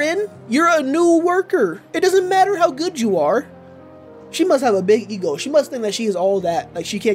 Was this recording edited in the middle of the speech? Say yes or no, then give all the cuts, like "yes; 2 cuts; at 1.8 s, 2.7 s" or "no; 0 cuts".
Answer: no; 0 cuts